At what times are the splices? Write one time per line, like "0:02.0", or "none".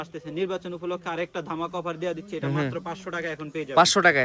none